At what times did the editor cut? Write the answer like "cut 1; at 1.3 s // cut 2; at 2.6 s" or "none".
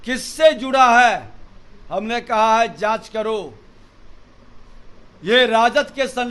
none